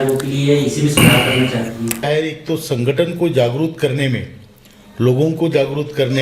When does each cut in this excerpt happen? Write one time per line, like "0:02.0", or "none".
0:02.1